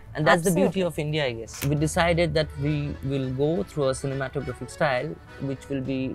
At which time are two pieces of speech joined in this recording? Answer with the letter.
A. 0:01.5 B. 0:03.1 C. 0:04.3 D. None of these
A